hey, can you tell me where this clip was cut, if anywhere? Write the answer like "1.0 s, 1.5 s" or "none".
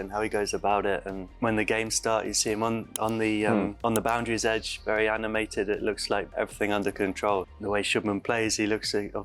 1.1 s, 3.7 s, 6.3 s, 7.5 s